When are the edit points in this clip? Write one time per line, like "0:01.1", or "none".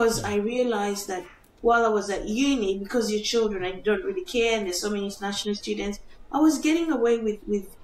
none